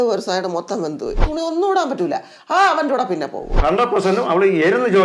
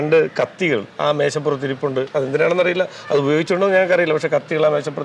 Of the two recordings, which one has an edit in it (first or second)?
first